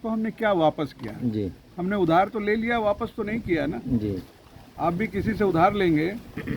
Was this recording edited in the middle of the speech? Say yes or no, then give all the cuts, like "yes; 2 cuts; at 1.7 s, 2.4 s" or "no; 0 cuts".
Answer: no; 0 cuts